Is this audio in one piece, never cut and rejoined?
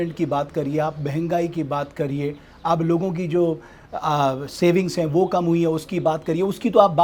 yes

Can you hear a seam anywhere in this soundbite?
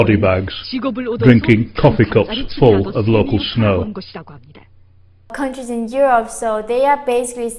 yes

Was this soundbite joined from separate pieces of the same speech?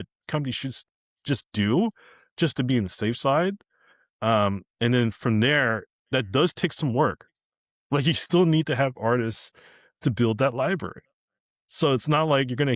no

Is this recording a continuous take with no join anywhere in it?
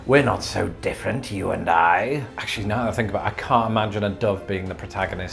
no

